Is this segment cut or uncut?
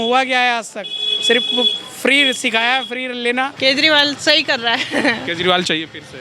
cut